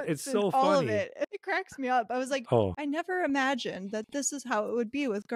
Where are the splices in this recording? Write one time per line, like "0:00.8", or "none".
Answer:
0:01.4